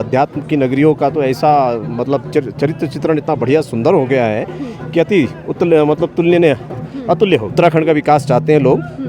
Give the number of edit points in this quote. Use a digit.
1